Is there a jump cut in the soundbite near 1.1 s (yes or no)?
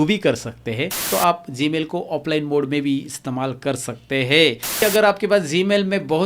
yes